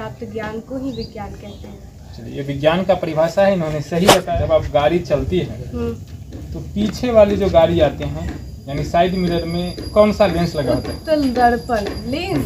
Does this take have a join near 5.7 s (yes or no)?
no